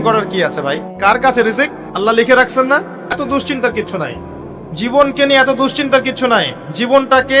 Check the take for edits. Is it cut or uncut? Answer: cut